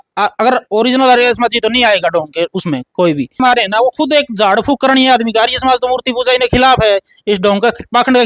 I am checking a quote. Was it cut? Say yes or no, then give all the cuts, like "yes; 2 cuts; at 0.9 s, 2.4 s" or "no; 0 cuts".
yes; 1 cut; at 3.4 s